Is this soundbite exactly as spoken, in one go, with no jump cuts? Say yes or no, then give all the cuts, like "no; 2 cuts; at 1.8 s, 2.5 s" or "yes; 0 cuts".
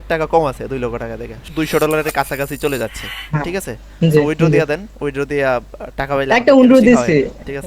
no; 1 cut; at 1.4 s